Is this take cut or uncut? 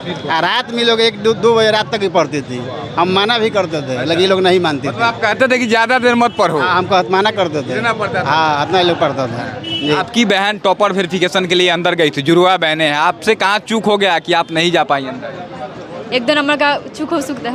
cut